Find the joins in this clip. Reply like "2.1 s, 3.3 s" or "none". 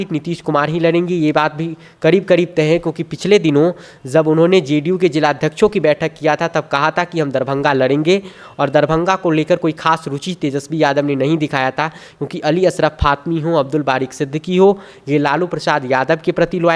none